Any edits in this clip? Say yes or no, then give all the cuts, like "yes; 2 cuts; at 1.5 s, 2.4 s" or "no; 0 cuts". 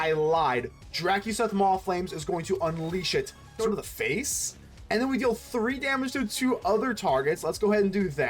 yes; 1 cut; at 3.5 s